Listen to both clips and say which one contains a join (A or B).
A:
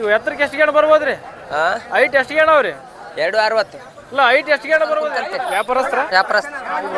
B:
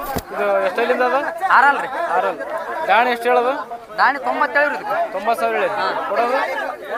A